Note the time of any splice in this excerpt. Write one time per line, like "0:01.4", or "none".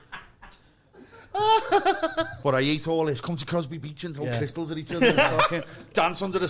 0:02.3